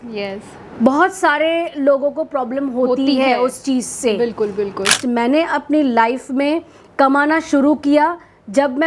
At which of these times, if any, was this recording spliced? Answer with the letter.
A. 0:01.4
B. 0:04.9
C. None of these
B